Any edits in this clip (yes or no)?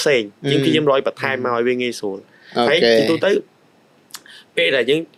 no